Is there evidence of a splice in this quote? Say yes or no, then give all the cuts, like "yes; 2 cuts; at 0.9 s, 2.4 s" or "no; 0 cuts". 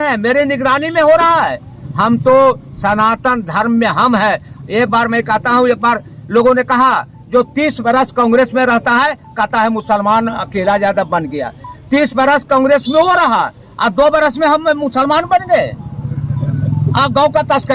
no; 0 cuts